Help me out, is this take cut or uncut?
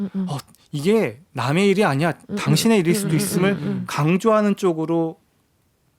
uncut